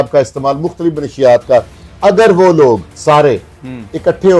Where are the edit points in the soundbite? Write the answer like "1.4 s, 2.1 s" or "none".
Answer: 2.9 s